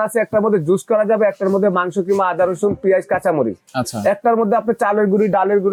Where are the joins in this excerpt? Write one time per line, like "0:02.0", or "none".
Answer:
none